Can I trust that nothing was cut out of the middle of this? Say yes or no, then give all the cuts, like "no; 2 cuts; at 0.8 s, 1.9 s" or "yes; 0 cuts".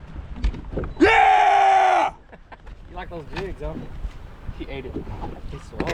yes; 0 cuts